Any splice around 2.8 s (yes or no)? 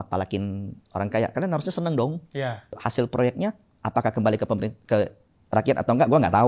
yes